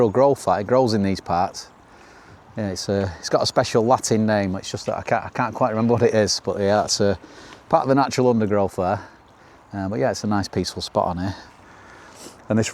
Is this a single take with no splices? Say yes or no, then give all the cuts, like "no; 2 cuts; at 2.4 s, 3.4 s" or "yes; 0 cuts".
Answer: yes; 0 cuts